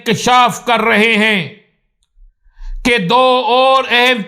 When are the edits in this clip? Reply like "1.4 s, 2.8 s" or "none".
none